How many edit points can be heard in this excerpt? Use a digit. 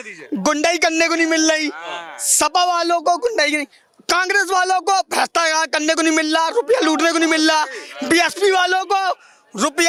0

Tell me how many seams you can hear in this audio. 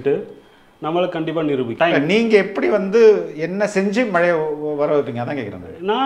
1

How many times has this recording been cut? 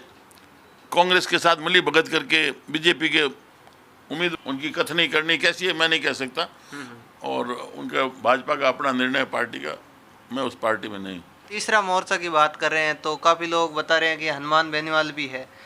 2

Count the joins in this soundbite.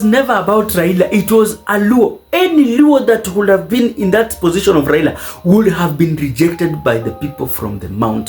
0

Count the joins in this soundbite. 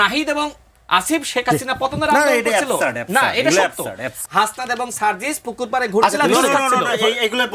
1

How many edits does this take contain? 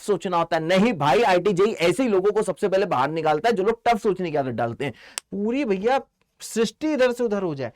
1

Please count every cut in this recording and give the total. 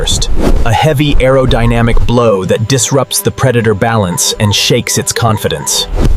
0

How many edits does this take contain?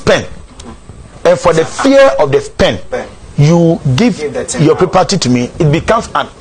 0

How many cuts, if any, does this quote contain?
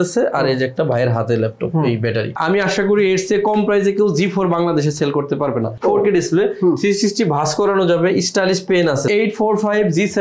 3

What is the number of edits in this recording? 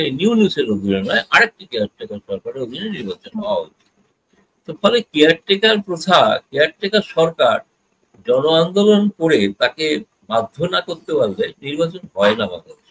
0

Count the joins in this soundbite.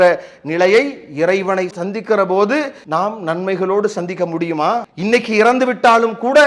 2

